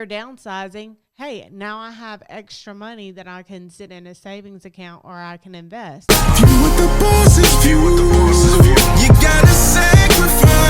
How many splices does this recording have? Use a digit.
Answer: 1